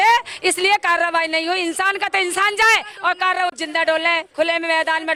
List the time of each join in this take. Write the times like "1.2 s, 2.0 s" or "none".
none

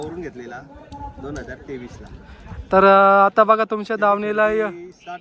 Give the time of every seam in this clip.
none

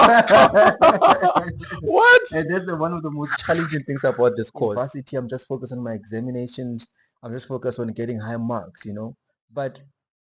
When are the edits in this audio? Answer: 4.7 s

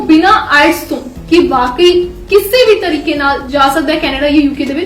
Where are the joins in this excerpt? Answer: 3.4 s

